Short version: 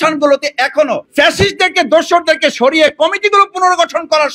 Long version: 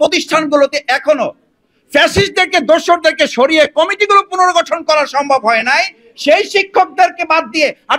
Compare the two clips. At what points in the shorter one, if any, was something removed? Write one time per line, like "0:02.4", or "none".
0:01.0